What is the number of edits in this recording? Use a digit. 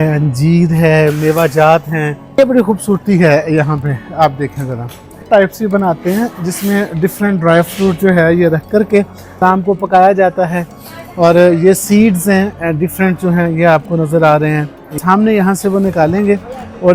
4